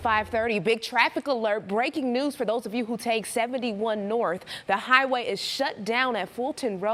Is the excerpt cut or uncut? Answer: uncut